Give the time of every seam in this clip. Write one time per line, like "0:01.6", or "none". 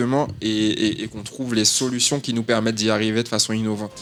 none